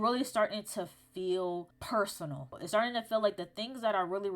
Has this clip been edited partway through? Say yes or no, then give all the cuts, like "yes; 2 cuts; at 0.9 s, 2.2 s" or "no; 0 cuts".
yes; 1 cut; at 2.4 s